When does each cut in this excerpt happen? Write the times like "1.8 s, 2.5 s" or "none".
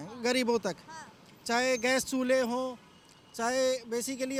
none